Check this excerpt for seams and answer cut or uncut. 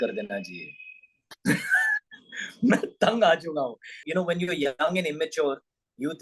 cut